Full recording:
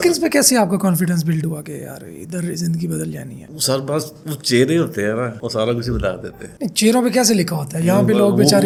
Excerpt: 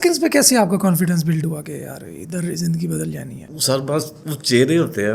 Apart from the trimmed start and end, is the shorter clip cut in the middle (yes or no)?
no